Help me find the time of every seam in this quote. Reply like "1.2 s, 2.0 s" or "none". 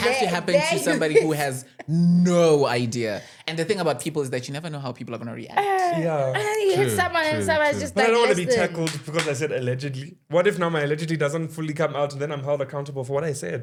none